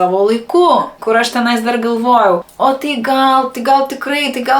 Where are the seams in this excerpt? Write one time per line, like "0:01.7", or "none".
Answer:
0:00.9
0:02.5